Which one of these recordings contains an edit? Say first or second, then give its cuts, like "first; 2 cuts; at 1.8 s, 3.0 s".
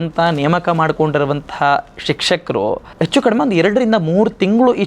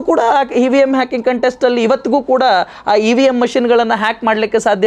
first; 1 cut; at 2.9 s